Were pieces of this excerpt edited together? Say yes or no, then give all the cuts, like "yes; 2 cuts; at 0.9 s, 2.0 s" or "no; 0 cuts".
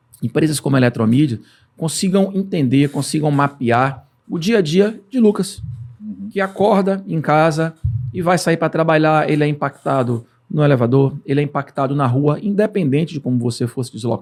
no; 0 cuts